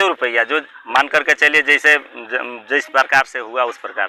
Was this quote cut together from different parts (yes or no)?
no